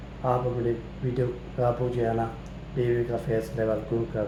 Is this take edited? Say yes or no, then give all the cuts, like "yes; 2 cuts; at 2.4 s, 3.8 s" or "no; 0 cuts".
no; 0 cuts